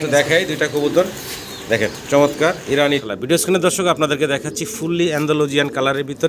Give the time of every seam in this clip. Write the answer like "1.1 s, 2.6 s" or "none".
3.0 s